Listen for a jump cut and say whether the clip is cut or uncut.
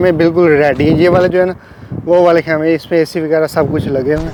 uncut